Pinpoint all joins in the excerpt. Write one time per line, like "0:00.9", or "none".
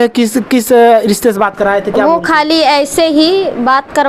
none